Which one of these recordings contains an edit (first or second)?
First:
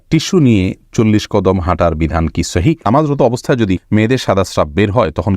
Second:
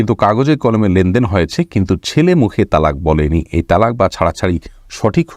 first